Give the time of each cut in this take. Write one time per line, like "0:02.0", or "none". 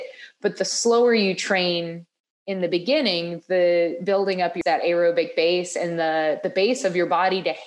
0:04.6